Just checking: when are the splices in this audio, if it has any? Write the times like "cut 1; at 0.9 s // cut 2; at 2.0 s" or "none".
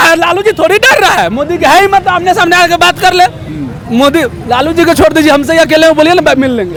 none